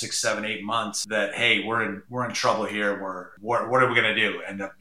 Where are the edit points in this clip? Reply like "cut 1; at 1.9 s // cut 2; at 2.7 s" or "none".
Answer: cut 1; at 1.0 s // cut 2; at 2.0 s // cut 3; at 3.3 s